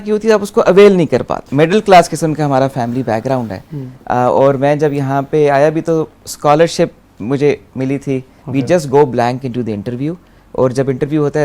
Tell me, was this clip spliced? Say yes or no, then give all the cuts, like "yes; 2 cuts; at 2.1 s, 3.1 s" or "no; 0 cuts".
yes; 2 cuts; at 1.4 s, 8.4 s